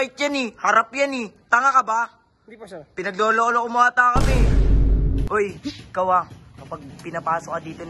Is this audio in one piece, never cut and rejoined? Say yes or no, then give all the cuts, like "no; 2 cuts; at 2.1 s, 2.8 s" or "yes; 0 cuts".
no; 1 cut; at 4.8 s